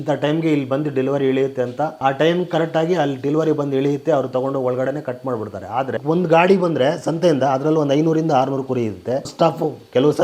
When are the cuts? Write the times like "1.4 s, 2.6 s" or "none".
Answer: 5.9 s